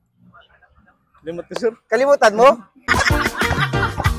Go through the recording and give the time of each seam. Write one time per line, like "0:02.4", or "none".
0:02.8